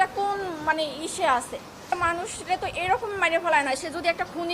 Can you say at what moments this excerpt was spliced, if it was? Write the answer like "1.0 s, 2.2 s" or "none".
1.8 s

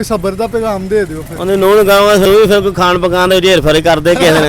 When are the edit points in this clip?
2.2 s

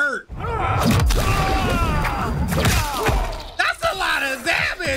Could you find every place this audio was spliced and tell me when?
none

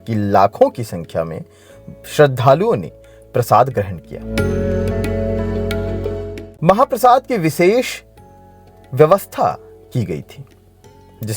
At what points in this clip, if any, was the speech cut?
6.3 s

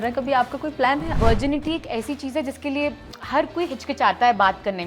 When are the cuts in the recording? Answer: 1.1 s

